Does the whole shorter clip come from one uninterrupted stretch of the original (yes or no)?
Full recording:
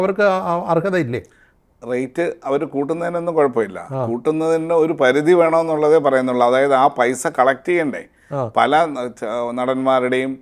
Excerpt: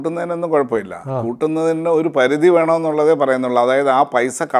yes